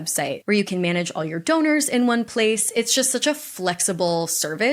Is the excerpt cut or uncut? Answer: uncut